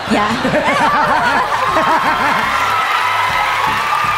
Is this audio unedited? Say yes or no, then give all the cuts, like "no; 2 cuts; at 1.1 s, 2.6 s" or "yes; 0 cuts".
yes; 0 cuts